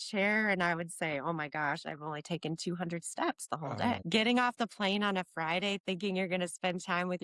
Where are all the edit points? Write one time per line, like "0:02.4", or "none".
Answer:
0:04.0